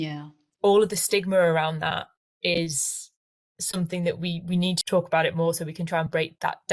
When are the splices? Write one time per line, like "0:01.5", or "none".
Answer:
0:04.8

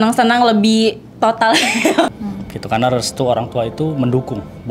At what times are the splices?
0:02.1

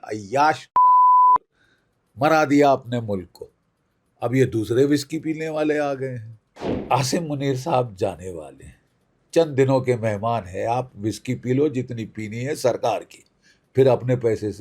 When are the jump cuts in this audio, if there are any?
0:06.8

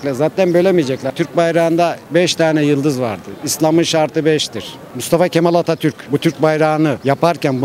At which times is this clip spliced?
0:01.1
0:04.8

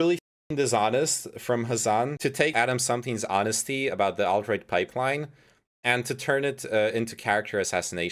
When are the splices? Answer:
0:02.3

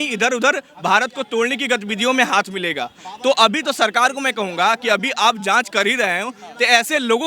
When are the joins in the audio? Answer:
none

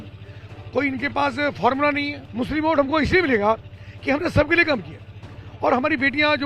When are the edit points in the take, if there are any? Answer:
0:02.2

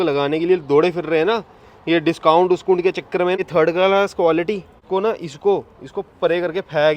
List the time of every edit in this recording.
0:03.4
0:04.7

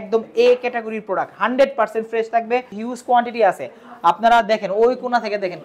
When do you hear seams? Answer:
0:02.8

